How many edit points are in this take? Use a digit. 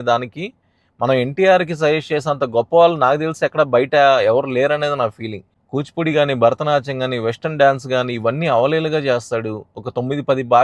1